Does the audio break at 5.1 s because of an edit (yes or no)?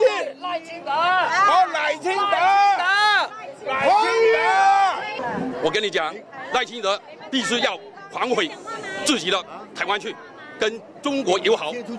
yes